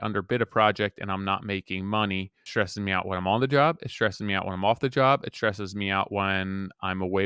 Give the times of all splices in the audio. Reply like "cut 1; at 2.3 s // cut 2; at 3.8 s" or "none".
cut 1; at 2.5 s